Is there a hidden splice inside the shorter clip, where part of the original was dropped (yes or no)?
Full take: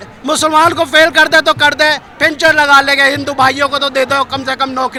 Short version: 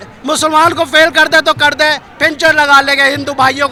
no